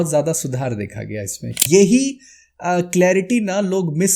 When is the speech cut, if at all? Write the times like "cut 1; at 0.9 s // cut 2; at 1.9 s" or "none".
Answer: cut 1; at 1.6 s